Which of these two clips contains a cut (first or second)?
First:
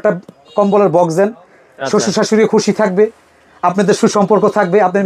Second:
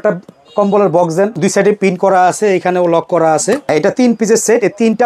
second